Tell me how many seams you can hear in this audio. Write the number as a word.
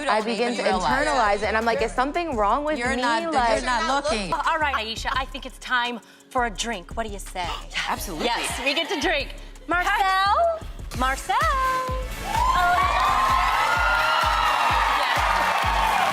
one